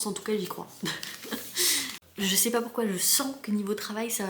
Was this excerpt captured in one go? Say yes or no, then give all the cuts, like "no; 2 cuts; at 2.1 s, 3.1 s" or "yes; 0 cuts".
yes; 0 cuts